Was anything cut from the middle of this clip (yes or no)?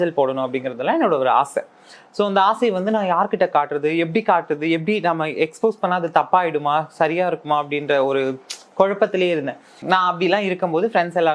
no